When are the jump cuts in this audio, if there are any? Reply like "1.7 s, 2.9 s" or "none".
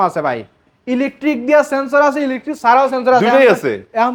none